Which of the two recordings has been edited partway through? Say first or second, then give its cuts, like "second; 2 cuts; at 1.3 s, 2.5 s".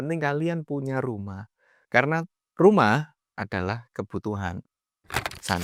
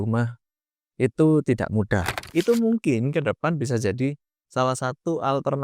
second; 1 cut; at 2.2 s